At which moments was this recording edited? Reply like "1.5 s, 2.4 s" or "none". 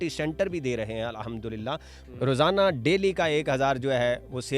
2.0 s